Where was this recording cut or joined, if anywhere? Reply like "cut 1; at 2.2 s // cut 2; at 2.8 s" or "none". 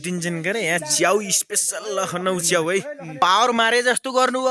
cut 1; at 3.2 s